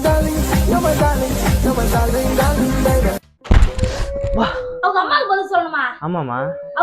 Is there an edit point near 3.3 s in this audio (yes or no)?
yes